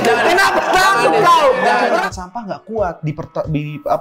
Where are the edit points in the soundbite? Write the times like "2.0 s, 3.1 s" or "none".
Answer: 2.0 s